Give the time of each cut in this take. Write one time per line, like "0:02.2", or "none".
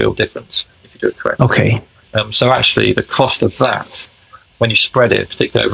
none